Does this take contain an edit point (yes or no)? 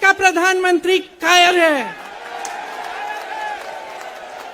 no